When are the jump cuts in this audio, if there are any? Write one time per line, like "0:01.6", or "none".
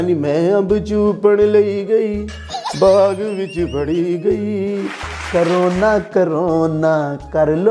0:05.2